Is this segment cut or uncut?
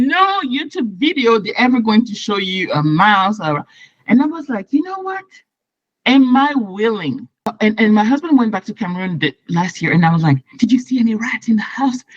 cut